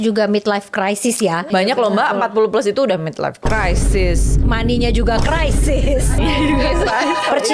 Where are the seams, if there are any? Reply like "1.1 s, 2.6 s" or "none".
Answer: 1.4 s